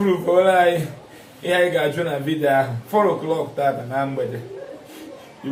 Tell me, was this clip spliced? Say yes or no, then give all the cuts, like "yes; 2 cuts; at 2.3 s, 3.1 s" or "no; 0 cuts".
no; 0 cuts